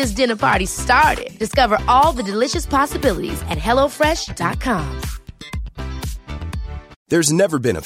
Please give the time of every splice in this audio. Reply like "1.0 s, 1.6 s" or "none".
6.9 s